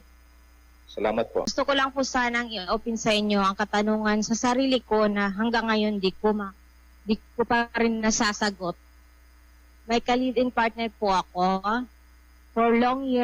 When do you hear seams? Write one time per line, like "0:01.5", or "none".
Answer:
0:01.5